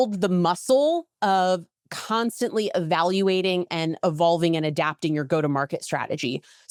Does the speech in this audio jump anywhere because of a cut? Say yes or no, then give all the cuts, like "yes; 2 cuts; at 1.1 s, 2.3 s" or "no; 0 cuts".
no; 0 cuts